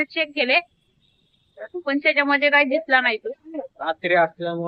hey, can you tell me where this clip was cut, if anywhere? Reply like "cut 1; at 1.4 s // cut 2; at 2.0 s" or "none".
none